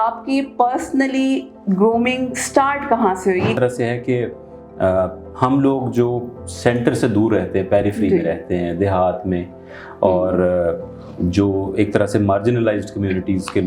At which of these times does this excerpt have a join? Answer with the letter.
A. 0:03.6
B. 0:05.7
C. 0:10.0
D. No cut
A